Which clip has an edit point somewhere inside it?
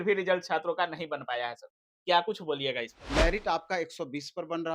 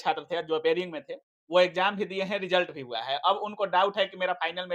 first; 1 cut; at 3.0 s

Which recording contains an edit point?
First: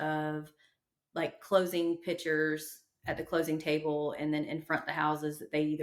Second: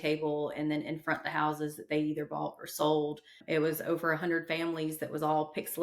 second; 1 cut; at 3.4 s

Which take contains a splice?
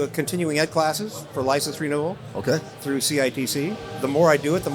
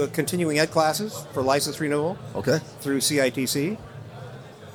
first; 1 cut; at 3.9 s

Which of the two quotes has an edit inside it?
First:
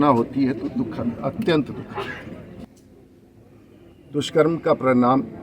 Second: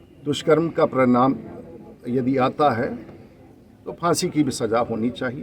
first; 1 cut; at 2.7 s

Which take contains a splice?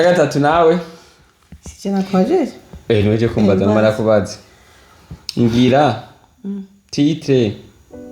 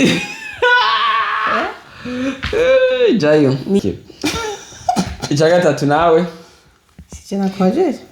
second; 1 cut; at 3.8 s

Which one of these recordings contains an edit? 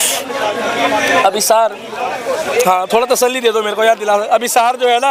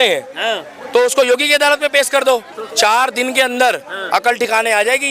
second; 1 cut; at 2.6 s

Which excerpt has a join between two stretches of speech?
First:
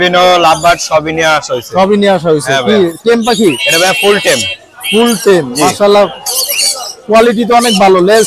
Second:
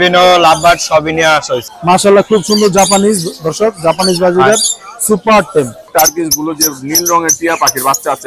second; 2 cuts; at 1.6 s, 5.8 s

